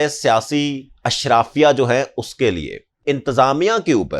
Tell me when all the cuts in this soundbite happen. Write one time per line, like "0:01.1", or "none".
0:03.0

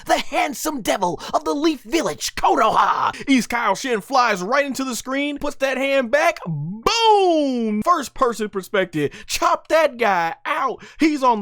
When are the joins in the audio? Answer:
0:03.1
0:05.4
0:07.8

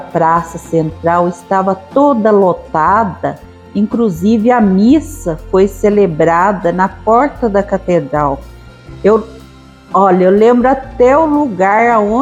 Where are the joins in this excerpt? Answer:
none

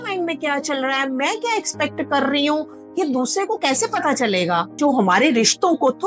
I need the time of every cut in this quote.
0:04.8

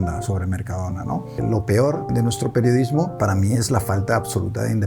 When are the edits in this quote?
0:01.4
0:02.1
0:03.1

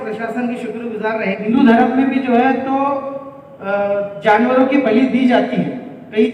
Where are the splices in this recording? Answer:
0:01.5

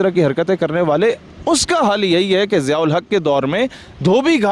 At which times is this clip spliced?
none

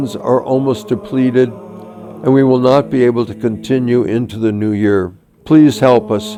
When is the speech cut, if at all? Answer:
none

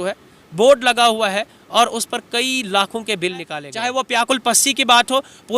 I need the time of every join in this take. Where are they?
0:03.6

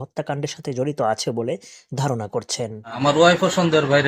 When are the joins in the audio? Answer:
0:03.0

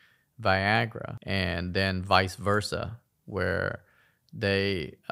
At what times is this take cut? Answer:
none

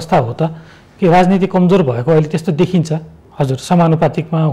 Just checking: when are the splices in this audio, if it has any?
0:03.2

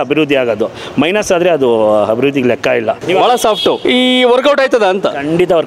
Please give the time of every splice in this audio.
0:03.0
0:03.8

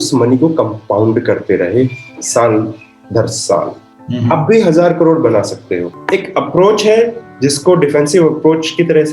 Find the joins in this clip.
0:05.9

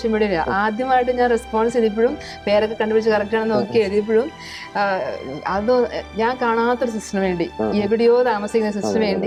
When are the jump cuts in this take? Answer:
none

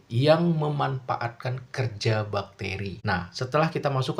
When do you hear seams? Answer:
0:03.0

